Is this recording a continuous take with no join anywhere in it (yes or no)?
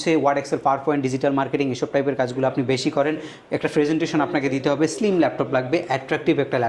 yes